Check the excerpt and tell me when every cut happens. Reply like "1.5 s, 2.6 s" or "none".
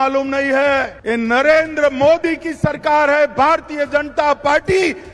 0.9 s